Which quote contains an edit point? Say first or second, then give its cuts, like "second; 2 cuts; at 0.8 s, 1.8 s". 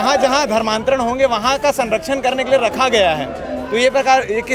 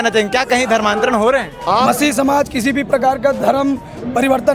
second; 1 cut; at 1.8 s